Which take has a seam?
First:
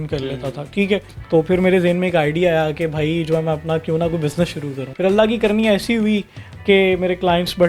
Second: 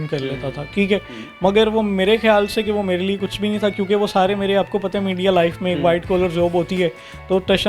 first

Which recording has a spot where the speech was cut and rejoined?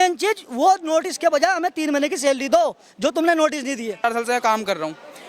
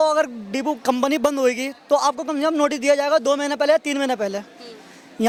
first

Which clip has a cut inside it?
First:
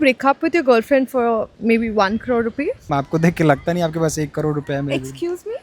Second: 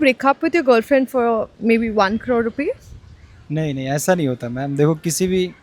first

